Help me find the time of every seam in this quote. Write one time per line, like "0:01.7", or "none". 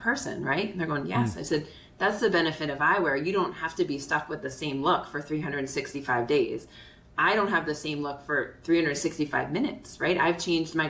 none